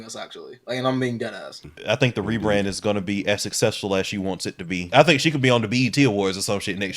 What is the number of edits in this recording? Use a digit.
2